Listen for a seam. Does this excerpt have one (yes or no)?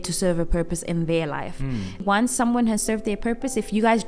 yes